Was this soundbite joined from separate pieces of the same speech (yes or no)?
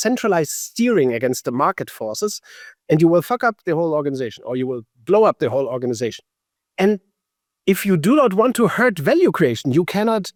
no